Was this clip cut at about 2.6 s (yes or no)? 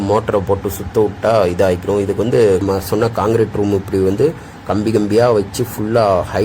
yes